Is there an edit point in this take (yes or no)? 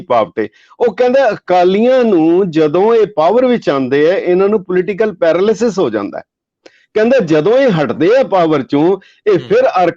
no